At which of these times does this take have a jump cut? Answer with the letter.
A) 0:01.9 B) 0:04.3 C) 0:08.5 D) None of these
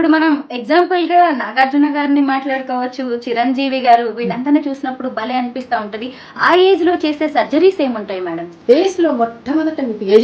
C